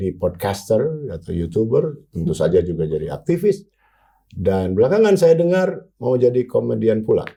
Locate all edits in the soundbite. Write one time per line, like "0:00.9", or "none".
none